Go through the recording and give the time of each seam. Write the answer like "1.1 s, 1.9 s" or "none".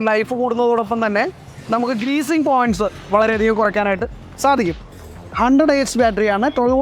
4.8 s